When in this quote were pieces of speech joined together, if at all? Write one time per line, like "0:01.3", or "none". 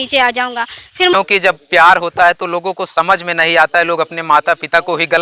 0:01.1

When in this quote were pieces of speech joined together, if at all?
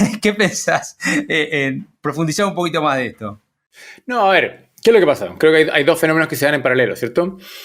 none

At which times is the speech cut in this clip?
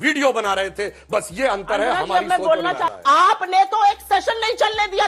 0:02.9

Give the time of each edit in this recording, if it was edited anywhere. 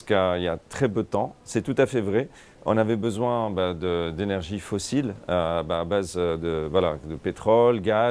none

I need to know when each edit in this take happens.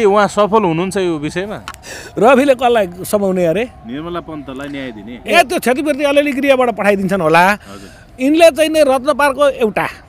0:05.3

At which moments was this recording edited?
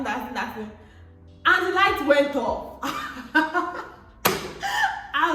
none

